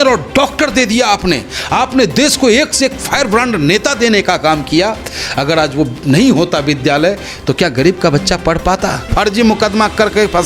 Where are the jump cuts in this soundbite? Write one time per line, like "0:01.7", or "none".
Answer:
0:09.1